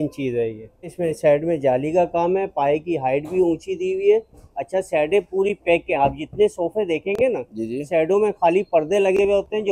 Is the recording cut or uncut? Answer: cut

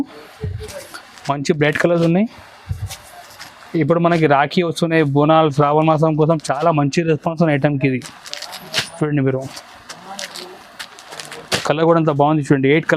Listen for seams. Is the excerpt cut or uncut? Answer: uncut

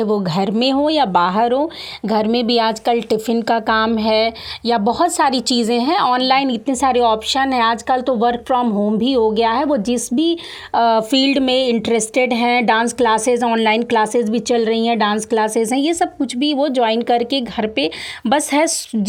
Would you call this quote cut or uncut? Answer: uncut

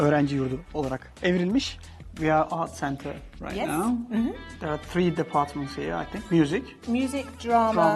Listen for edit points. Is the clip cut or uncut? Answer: cut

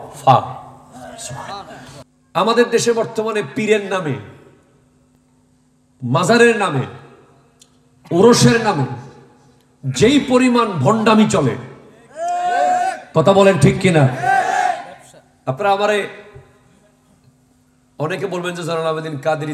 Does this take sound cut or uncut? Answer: cut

